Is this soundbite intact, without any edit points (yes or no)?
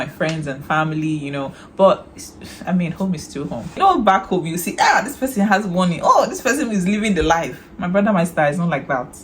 no